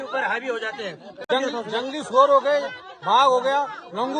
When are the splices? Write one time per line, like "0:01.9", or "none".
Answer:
0:01.3

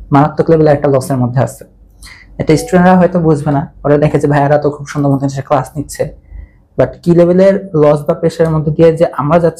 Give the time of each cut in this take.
none

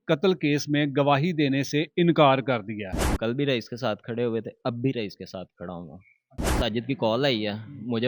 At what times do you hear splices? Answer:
0:03.2
0:06.6

